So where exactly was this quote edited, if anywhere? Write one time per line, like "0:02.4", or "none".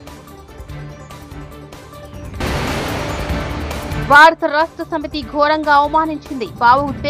0:02.4
0:04.0